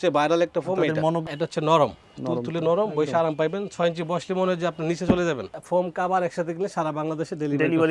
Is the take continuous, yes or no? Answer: no